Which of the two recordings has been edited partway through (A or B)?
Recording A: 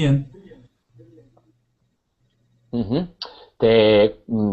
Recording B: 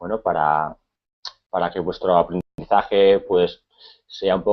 A